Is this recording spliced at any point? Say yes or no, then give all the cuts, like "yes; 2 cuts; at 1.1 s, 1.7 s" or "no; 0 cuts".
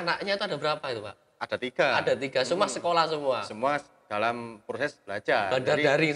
no; 0 cuts